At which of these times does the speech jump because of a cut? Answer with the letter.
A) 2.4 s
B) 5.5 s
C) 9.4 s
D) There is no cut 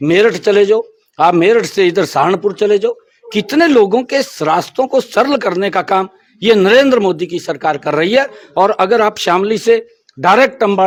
D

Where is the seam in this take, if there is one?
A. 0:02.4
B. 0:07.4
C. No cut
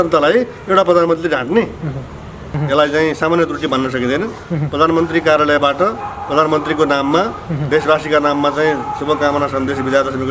A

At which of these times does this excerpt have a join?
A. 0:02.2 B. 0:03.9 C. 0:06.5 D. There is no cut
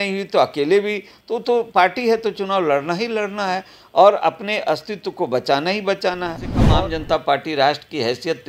C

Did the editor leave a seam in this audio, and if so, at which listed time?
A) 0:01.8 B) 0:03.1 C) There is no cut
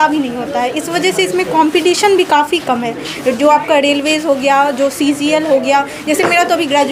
C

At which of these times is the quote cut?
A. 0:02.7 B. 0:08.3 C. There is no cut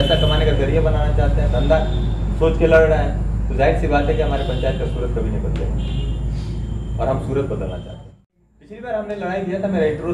B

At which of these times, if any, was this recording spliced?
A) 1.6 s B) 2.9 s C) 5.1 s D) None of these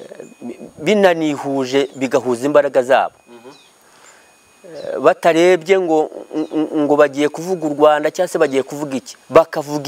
D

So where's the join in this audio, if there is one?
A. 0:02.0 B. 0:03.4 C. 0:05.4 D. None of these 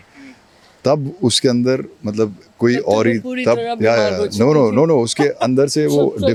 D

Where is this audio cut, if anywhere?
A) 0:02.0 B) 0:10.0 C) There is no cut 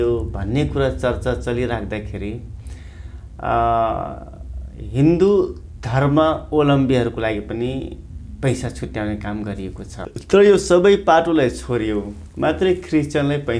B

